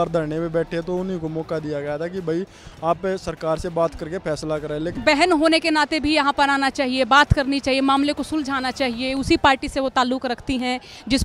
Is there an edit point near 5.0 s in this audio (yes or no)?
yes